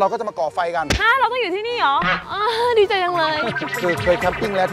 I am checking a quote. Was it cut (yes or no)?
yes